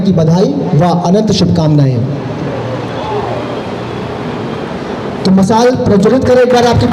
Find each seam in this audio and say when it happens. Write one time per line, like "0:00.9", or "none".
none